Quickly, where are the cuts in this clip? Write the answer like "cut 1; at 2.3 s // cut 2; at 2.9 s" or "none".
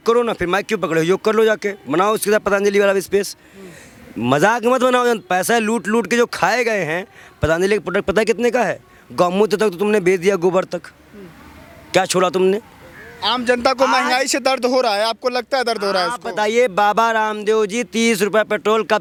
none